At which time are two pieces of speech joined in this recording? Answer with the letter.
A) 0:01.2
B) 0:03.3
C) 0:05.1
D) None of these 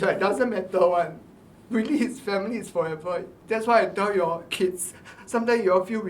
B